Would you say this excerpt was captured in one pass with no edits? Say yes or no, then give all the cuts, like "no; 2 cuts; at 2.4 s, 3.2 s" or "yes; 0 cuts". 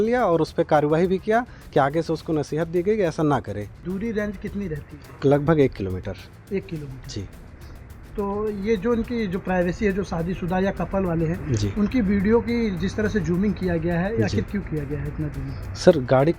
no; 1 cut; at 3.8 s